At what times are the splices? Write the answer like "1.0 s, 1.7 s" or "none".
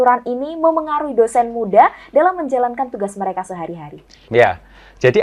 none